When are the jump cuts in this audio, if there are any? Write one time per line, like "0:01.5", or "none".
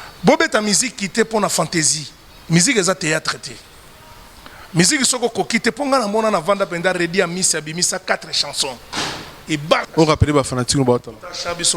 0:09.9